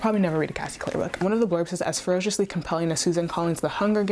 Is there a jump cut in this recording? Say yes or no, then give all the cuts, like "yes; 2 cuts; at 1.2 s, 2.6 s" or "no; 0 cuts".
yes; 1 cut; at 1.1 s